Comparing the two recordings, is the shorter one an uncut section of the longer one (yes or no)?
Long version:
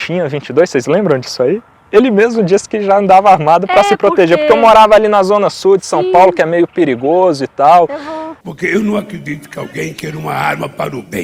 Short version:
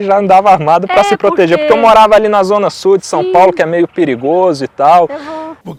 yes